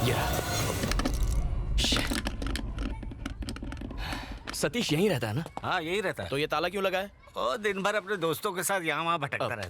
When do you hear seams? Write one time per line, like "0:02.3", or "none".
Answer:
0:04.4